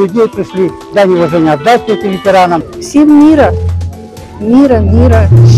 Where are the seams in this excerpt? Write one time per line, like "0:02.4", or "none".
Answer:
0:02.8